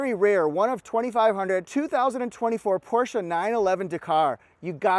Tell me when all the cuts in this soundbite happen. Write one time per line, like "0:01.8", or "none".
0:01.7